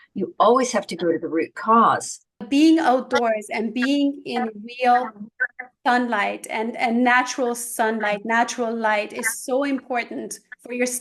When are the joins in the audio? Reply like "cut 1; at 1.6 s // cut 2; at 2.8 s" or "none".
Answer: cut 1; at 2.4 s